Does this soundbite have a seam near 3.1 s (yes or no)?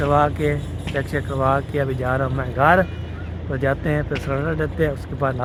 no